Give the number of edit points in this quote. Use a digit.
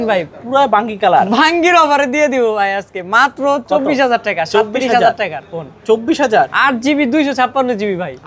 0